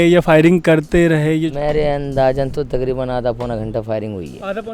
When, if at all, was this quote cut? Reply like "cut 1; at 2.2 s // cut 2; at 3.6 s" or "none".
cut 1; at 1.4 s